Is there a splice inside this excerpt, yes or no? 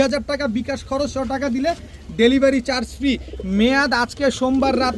no